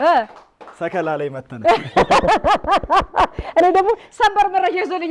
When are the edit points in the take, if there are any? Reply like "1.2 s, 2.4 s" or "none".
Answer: none